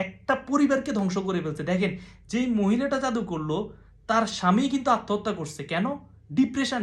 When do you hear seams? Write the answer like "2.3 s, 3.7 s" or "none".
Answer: none